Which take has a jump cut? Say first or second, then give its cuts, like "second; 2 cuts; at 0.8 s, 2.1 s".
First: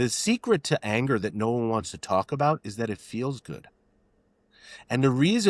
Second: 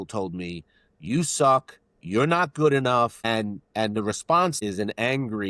second; 2 cuts; at 3.2 s, 4.6 s